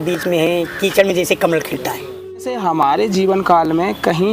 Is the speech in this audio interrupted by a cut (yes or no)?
yes